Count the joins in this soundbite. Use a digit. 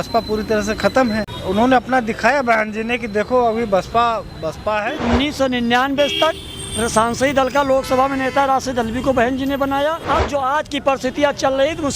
3